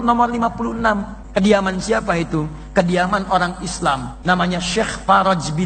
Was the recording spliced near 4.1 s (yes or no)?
yes